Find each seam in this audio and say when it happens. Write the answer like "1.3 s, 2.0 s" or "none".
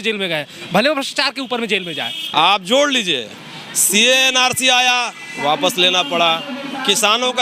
2.2 s